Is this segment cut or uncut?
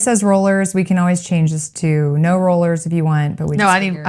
uncut